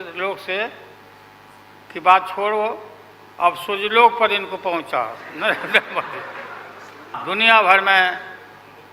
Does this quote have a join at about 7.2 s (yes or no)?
yes